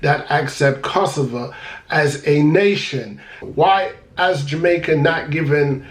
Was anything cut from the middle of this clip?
yes; 1 cut; at 3.3 s

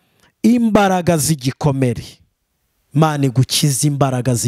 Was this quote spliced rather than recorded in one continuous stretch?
no; 0 cuts

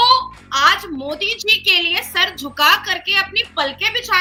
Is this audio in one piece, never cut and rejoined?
yes; 0 cuts

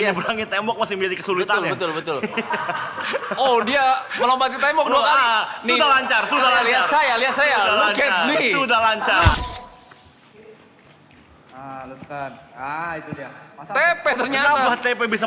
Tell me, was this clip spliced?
yes; 1 cut; at 9.4 s

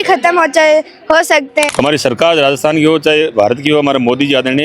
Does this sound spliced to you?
yes; 1 cut; at 1.7 s

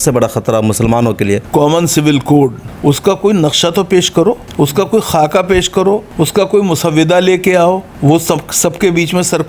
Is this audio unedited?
no; 5 cuts; at 1.4 s, 2.7 s, 4.5 s, 6.1 s, 7.9 s

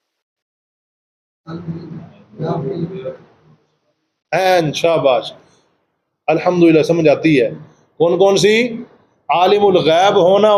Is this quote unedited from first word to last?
yes; 0 cuts

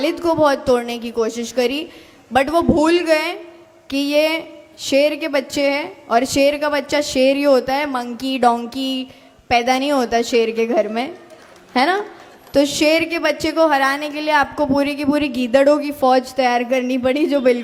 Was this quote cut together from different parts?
no; 0 cuts

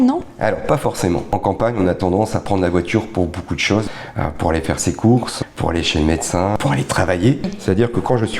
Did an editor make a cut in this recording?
yes; 5 cuts; at 1.3 s, 3.8 s, 5.3 s, 6.6 s, 7.5 s

